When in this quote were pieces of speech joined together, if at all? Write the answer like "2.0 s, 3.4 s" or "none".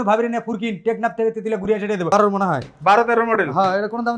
2.1 s